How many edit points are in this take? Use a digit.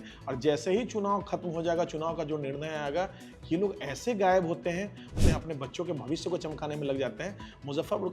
1